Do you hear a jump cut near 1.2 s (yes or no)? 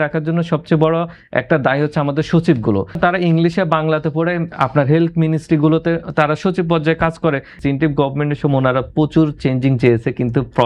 no